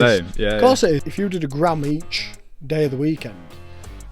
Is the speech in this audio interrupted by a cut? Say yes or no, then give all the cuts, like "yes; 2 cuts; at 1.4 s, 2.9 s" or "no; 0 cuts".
yes; 1 cut; at 1.1 s